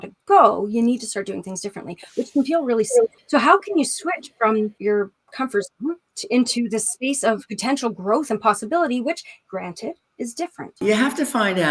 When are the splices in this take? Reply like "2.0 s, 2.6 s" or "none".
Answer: 3.2 s, 4.8 s, 6.1 s, 7.5 s, 9.3 s, 10.8 s